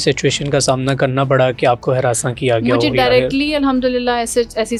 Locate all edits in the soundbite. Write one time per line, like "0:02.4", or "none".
none